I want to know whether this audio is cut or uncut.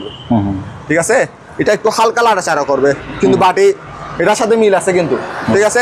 uncut